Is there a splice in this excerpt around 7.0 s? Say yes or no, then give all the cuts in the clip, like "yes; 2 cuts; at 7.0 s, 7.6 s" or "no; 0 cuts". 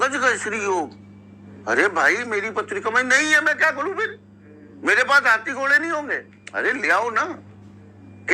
no; 1 cut; at 1.0 s